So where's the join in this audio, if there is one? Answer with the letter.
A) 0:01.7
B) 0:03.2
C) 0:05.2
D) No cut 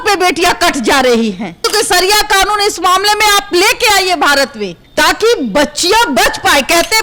A